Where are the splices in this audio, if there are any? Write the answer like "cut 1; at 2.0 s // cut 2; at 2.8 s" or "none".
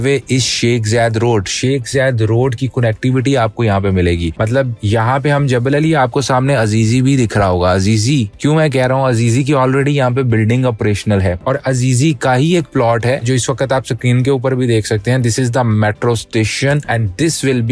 none

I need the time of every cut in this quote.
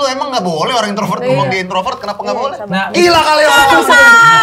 none

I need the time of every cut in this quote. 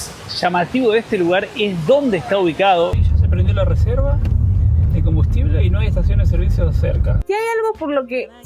cut 1; at 3.0 s // cut 2; at 7.2 s

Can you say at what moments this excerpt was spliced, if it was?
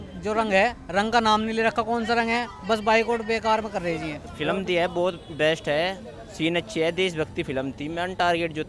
cut 1; at 4.2 s

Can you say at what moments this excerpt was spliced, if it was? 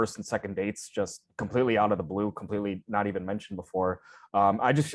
none

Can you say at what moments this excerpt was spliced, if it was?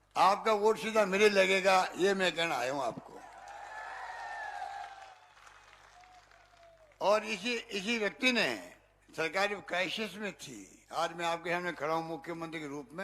cut 1; at 5.2 s

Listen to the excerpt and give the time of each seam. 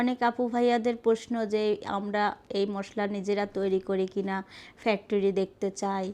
none

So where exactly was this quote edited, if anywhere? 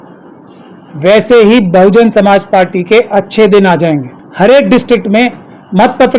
cut 1; at 4.2 s

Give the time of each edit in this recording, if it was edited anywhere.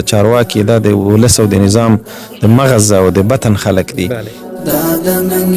cut 1; at 4.4 s

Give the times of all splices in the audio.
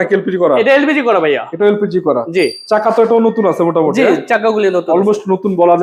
none

